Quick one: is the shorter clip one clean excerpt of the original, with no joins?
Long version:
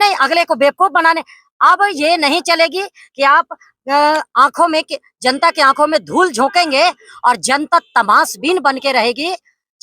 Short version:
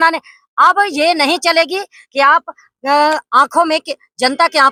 yes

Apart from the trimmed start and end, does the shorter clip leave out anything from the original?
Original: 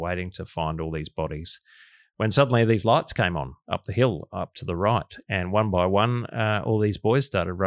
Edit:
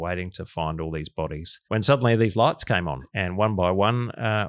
yes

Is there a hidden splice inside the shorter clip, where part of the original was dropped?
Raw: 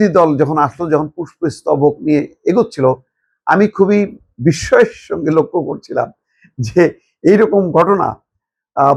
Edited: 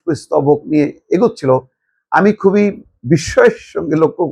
no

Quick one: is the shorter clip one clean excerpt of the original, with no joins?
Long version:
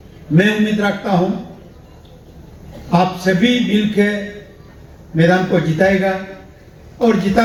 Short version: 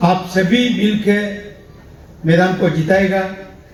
yes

